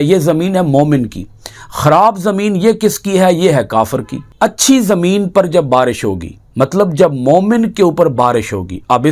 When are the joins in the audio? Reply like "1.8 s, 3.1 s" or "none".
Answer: 4.2 s